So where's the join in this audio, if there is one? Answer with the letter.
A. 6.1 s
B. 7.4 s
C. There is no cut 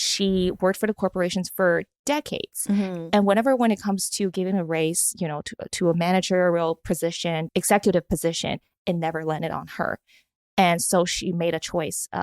B